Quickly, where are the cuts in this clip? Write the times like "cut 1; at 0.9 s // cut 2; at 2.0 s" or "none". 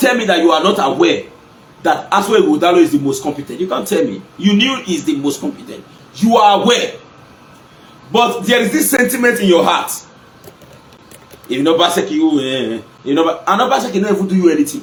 none

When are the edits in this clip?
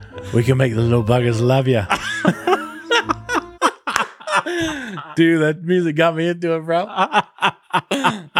none

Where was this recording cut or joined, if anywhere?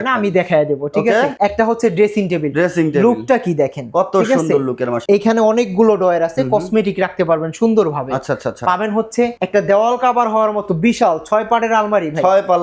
none

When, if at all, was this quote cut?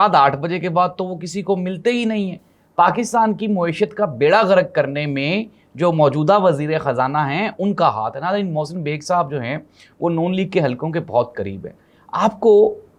none

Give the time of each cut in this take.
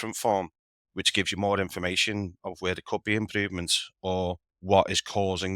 cut 1; at 4.5 s

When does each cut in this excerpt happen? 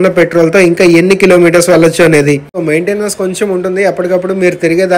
cut 1; at 2.5 s

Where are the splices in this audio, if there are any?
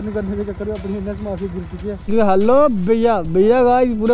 cut 1; at 2.1 s

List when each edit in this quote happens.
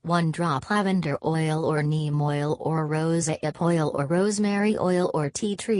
cut 1; at 2.3 s

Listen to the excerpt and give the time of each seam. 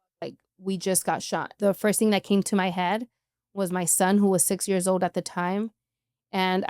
cut 1; at 1.5 s

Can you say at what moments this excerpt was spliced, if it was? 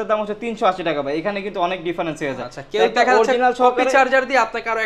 none

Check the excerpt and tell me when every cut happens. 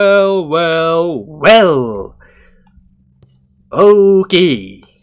none

